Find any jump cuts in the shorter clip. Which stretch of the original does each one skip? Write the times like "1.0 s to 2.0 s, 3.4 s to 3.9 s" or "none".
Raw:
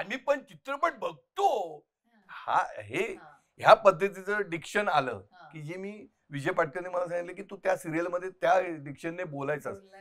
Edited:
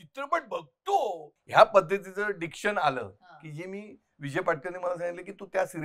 1.8 s to 3.4 s

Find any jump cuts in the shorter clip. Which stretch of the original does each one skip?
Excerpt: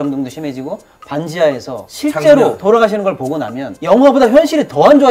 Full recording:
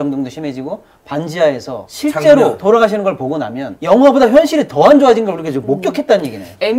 none

